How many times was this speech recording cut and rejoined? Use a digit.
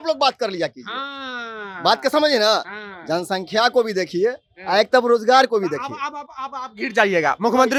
0